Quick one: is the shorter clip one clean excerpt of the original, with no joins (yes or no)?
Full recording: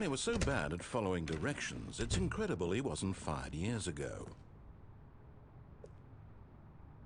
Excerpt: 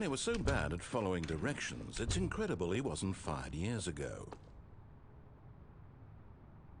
no